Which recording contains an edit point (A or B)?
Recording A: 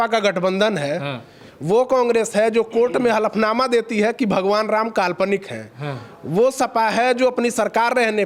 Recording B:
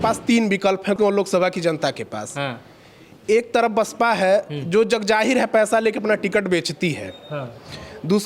B